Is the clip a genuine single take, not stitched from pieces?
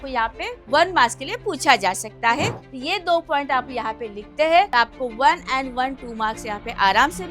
no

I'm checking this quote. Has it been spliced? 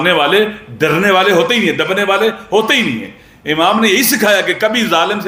no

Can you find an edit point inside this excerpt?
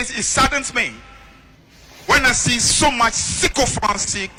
no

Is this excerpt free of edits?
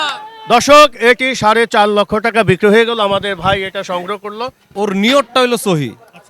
no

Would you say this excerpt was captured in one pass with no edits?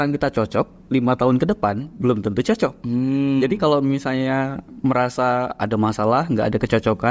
yes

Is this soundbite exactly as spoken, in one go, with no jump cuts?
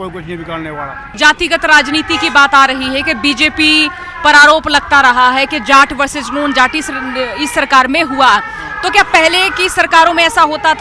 no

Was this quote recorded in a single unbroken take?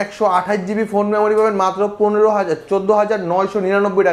yes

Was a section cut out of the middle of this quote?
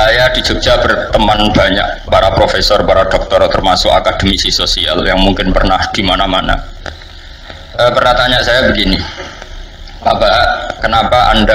no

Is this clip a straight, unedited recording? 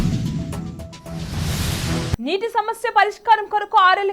no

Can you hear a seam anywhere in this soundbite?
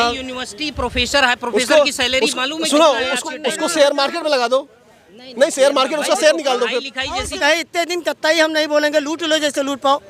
yes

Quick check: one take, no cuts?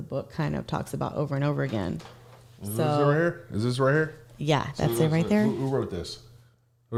yes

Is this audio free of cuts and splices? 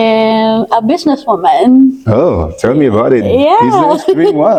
yes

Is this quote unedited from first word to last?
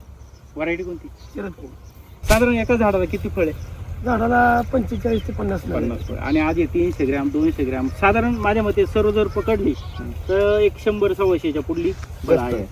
no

